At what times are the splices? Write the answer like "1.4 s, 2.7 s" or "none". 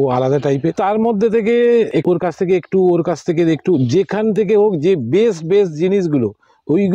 0.8 s, 1.9 s

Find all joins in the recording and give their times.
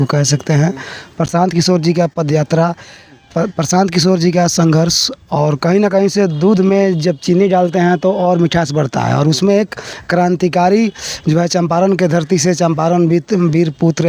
none

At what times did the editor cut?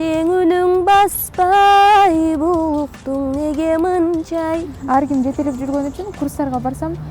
4.7 s

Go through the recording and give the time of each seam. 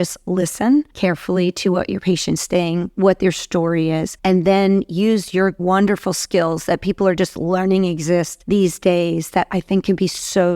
0.9 s, 4.1 s, 5.6 s, 8.4 s

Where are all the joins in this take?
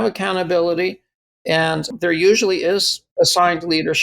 3.0 s

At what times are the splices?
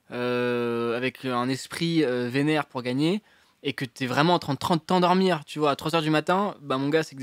none

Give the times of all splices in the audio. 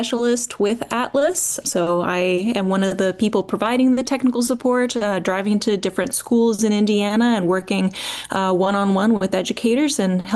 none

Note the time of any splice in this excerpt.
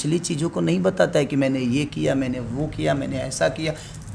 none

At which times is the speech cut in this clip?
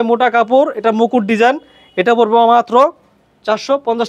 none

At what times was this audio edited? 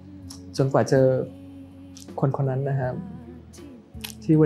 none

